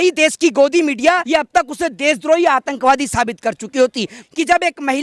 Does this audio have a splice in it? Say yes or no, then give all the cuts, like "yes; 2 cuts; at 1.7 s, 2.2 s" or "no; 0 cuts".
yes; 2 cuts; at 1.2 s, 4.2 s